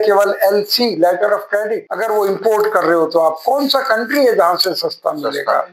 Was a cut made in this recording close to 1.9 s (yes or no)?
yes